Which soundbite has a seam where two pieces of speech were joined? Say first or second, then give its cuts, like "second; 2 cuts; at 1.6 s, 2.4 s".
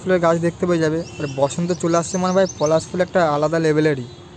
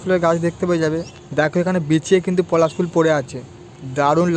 second; 1 cut; at 1.1 s